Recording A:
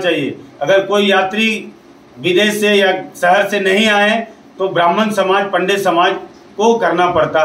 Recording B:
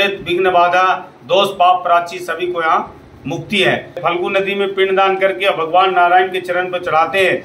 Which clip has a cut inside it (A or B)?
B